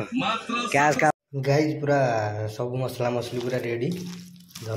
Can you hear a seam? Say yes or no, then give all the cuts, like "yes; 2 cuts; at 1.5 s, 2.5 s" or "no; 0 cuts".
yes; 1 cut; at 1.1 s